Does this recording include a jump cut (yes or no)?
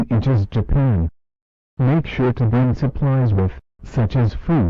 no